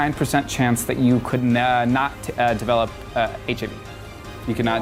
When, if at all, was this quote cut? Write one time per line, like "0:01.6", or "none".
none